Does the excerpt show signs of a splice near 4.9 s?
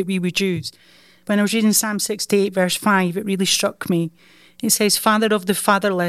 no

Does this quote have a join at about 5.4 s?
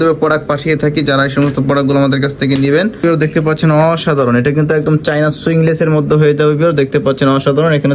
no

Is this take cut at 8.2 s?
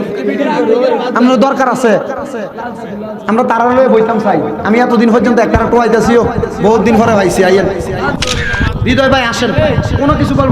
yes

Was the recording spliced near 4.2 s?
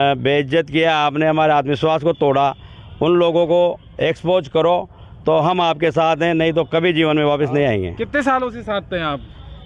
no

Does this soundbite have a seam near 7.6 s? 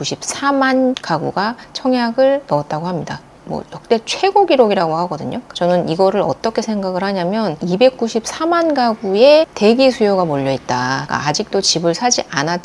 yes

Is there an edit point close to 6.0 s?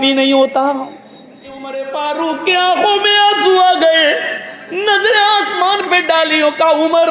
no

